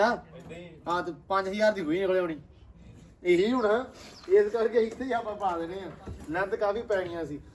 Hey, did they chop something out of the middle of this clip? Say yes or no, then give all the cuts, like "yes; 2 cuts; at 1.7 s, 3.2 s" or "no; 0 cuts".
no; 0 cuts